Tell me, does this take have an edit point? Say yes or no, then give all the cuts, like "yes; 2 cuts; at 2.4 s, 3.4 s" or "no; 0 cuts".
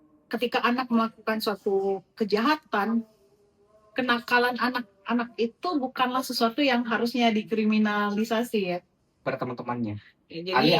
yes; 1 cut; at 9.2 s